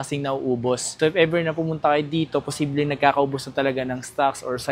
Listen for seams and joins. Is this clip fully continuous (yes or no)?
no